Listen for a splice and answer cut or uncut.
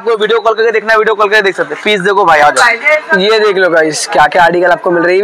uncut